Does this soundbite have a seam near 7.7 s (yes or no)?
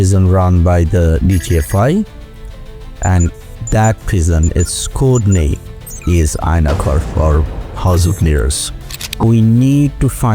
no